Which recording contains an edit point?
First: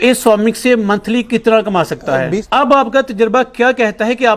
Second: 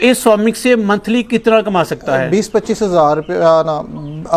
first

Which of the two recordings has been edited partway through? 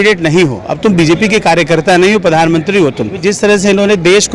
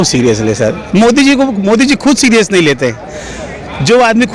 first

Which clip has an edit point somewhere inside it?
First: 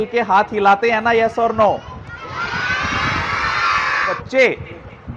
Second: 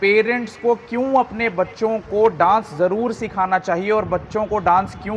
first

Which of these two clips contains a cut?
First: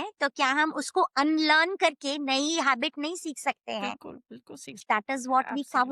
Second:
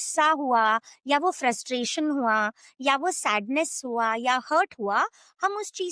first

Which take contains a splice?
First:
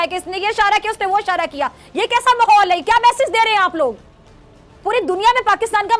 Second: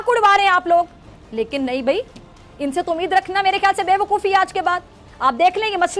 second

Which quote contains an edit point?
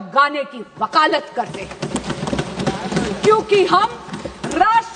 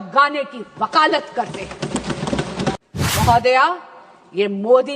second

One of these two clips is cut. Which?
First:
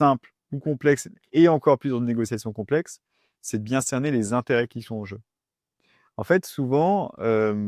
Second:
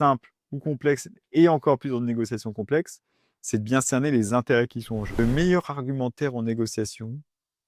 second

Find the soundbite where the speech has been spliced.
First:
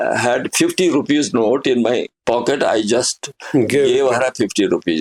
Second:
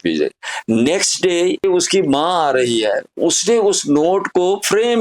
second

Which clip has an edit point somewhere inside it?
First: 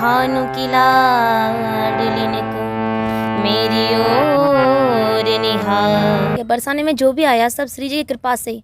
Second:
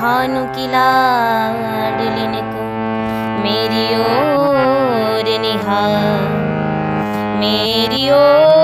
first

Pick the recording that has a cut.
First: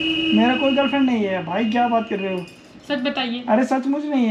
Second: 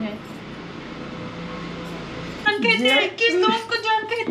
second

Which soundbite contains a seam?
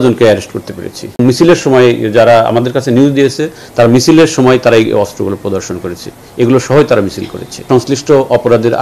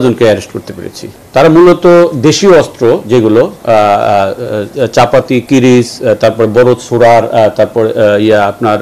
first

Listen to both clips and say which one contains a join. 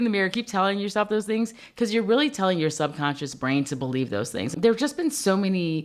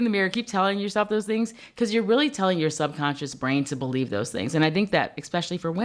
first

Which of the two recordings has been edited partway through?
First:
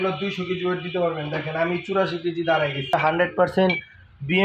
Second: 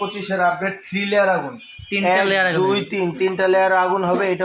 first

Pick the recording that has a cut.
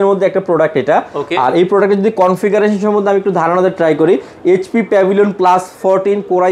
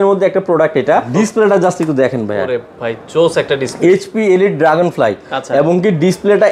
second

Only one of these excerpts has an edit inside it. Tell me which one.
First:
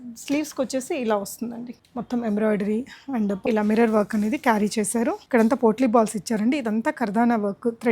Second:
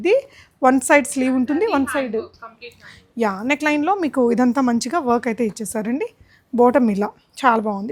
first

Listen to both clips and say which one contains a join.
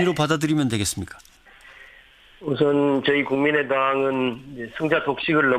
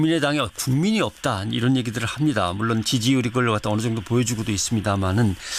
first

